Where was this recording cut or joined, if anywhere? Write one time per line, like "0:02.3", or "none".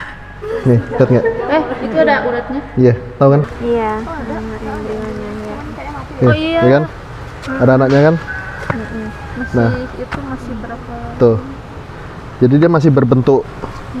0:03.5